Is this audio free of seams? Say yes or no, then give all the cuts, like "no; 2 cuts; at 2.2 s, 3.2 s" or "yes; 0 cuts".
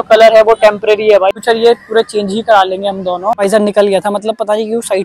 no; 2 cuts; at 1.4 s, 3.4 s